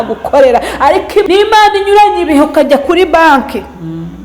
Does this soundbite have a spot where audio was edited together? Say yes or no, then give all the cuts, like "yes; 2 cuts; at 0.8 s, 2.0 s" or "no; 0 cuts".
yes; 1 cut; at 1.2 s